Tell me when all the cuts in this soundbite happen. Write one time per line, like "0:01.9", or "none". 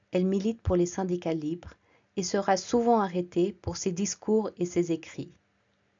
none